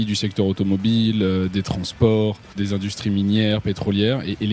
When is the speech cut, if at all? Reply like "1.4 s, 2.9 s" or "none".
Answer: 2.5 s